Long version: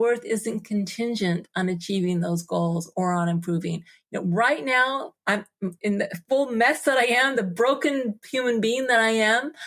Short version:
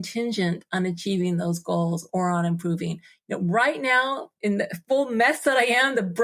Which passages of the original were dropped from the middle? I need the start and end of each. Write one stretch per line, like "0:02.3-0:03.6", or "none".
0:05.2-0:05.7